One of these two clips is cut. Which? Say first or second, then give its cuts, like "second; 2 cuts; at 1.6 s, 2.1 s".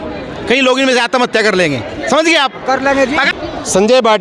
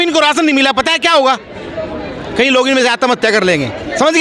first; 1 cut; at 3.3 s